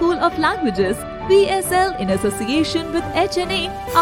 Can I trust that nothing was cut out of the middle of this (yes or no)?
yes